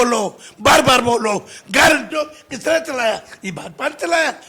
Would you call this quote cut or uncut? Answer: cut